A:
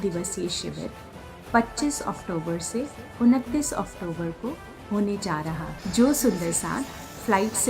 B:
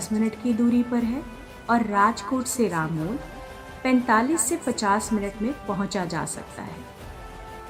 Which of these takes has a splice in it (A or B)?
A